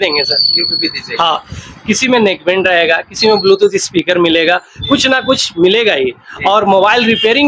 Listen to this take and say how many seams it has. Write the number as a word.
zero